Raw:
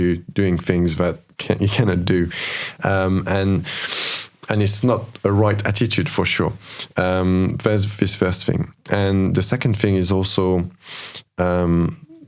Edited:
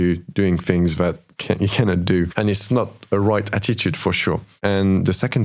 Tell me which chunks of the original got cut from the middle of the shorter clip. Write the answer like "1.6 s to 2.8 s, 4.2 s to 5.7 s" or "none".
2.3 s to 4.4 s, 6.6 s to 8.8 s